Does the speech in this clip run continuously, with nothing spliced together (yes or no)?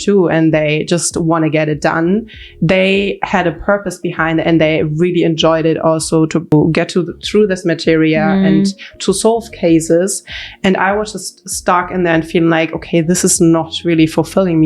no